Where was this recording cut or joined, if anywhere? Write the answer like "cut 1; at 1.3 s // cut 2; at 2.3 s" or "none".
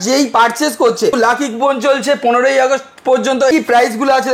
cut 1; at 1.1 s // cut 2; at 3.5 s

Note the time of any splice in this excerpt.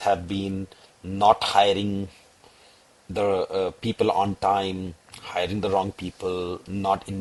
none

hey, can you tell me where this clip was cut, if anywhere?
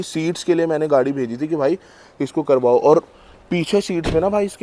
none

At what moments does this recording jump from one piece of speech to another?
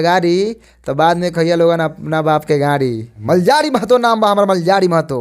cut 1; at 3.1 s

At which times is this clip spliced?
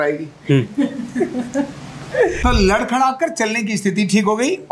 cut 1; at 2.4 s

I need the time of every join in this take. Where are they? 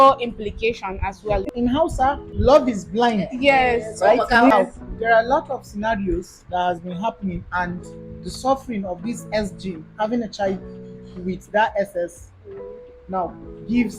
cut 1; at 1.5 s

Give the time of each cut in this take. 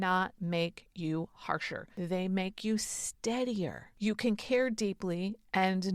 cut 1; at 1.8 s // cut 2; at 3.8 s

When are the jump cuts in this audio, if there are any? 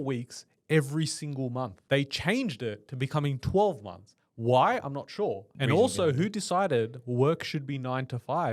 cut 1; at 1.8 s // cut 2; at 5.5 s

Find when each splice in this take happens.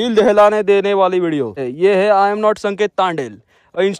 cut 1; at 1.7 s

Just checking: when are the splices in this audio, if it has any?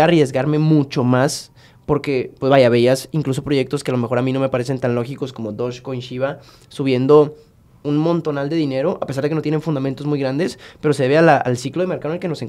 none

